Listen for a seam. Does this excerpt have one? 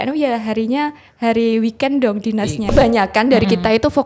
yes; 1 cut; at 2.7 s

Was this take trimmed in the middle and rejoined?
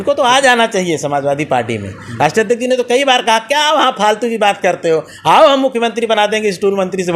no; 0 cuts

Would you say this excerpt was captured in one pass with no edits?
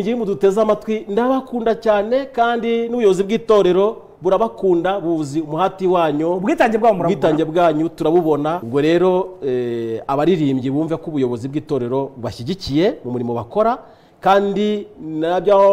no; 1 cut; at 8.6 s

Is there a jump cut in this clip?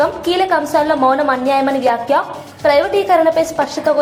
no; 0 cuts

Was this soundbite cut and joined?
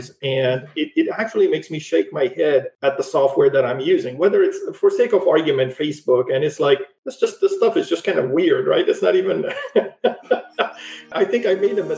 no; 0 cuts

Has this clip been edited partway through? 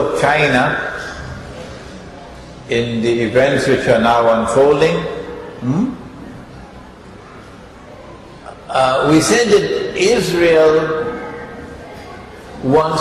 no; 0 cuts

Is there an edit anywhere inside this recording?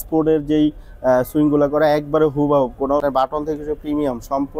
yes; 1 cut; at 3.0 s

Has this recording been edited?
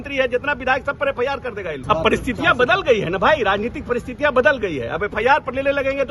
yes; 1 cut; at 1.8 s

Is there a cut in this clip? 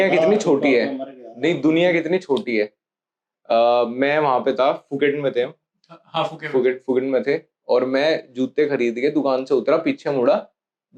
no; 0 cuts

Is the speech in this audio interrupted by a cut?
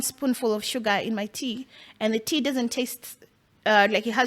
no; 0 cuts

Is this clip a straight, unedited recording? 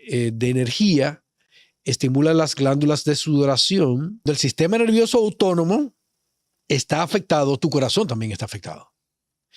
no; 1 cut; at 4.2 s

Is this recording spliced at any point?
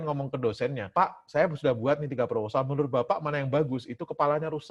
no; 0 cuts

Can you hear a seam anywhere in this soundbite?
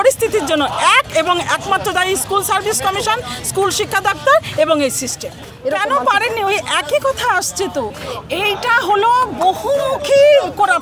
no; 0 cuts

